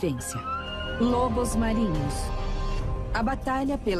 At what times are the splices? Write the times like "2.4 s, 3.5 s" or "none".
2.6 s